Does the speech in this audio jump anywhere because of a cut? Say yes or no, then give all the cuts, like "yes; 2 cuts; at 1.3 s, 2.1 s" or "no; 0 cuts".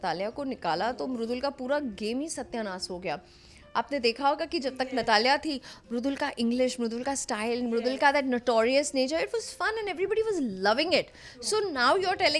no; 0 cuts